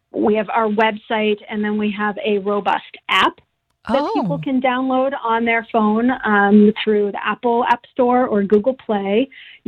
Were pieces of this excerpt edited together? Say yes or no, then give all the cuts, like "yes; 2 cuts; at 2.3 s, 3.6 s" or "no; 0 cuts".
no; 0 cuts